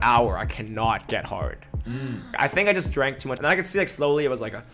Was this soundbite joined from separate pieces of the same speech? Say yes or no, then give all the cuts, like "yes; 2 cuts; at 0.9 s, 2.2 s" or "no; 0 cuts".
yes; 2 cuts; at 2.3 s, 3.3 s